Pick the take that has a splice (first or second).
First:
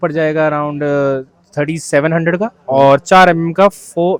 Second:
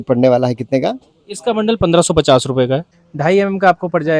second